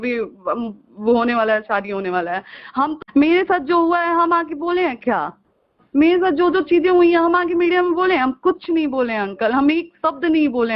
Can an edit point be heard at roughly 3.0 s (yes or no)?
yes